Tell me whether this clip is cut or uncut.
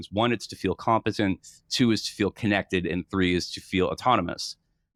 uncut